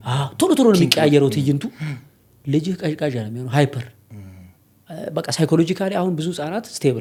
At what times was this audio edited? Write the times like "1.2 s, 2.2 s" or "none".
none